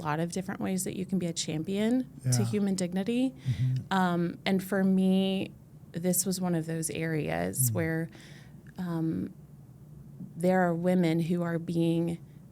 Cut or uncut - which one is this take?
uncut